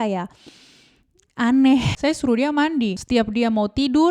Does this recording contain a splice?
yes; 2 cuts; at 1.9 s, 3.0 s

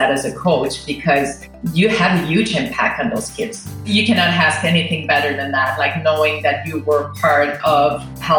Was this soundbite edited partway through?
yes; 1 cut; at 3.8 s

